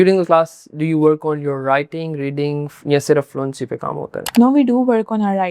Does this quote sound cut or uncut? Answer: cut